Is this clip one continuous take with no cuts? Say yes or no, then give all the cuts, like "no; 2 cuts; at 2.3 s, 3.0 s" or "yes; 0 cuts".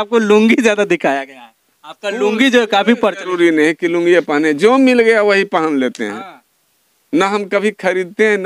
yes; 0 cuts